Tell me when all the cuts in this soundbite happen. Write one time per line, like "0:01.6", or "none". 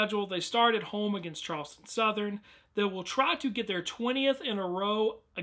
0:04.4